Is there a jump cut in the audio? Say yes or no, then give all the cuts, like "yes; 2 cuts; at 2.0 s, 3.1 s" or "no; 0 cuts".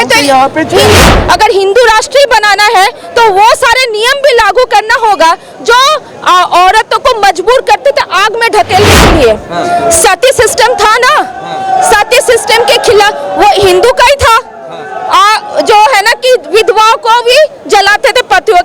yes; 1 cut; at 1.1 s